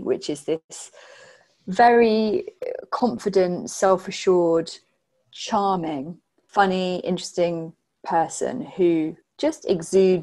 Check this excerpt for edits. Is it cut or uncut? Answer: cut